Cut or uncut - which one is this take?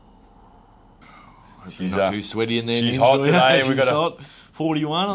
cut